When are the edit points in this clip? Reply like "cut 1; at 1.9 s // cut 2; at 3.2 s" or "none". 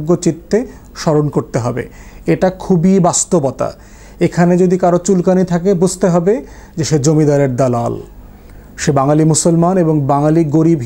none